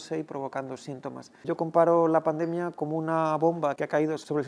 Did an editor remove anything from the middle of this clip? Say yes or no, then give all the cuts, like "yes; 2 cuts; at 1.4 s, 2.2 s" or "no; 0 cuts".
yes; 1 cut; at 1.3 s